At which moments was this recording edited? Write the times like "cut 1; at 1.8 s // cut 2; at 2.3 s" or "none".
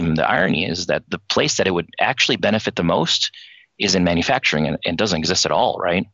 none